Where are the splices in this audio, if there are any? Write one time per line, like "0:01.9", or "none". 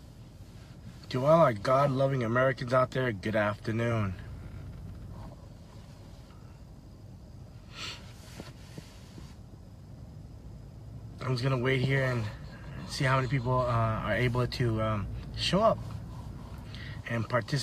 none